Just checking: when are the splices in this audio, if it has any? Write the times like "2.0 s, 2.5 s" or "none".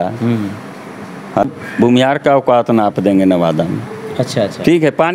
1.4 s